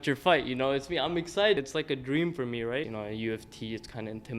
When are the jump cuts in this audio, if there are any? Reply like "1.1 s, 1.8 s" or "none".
1.6 s, 2.9 s